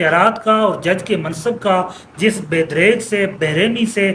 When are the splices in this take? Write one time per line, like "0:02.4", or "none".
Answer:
none